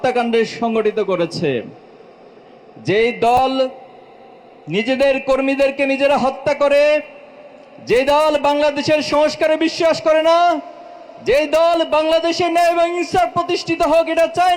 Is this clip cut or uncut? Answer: uncut